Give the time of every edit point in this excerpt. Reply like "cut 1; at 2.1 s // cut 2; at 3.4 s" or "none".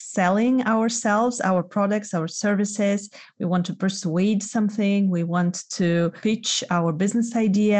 cut 1; at 6.2 s

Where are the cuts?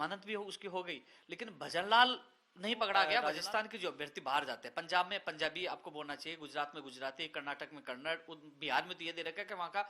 cut 1; at 3.2 s

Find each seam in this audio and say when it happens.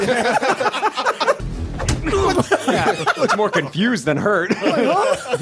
cut 1; at 1.5 s

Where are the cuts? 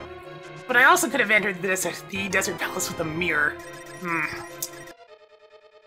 cut 1; at 4.9 s

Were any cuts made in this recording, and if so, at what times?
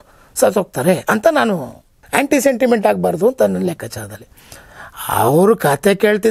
cut 1; at 2.0 s

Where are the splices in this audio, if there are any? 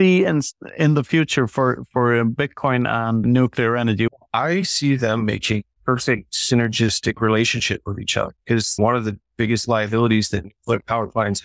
cut 1; at 3.2 s // cut 2; at 4.1 s // cut 3; at 6.2 s // cut 4; at 8.8 s

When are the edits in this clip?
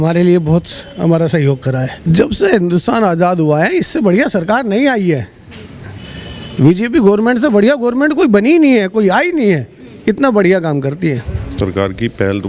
cut 1; at 1.9 s // cut 2; at 11.4 s

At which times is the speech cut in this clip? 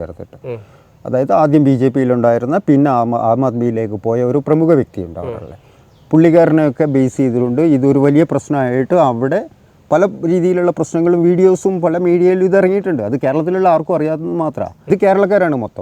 cut 1; at 14.9 s

